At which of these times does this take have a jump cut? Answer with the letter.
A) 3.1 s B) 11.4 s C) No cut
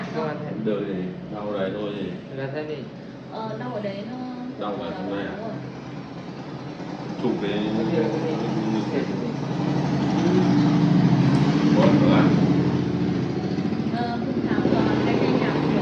C